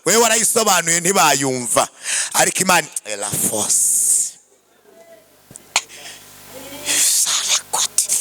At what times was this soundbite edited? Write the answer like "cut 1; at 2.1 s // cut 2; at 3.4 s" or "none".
none